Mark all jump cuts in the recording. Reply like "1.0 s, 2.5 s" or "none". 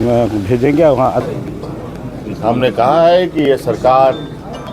1.3 s